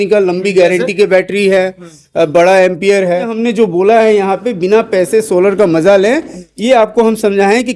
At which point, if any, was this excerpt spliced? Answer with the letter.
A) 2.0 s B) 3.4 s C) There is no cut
B